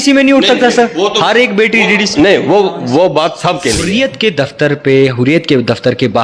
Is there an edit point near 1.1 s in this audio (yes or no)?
no